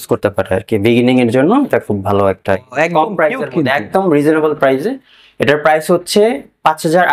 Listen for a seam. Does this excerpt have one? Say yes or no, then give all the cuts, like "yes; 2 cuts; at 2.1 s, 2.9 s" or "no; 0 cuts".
no; 0 cuts